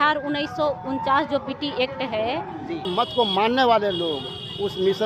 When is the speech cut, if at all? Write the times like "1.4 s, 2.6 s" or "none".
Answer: 2.9 s